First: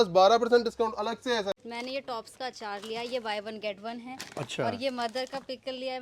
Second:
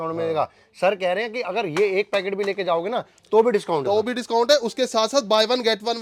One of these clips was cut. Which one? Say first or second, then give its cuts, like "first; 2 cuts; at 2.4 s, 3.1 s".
first; 1 cut; at 1.6 s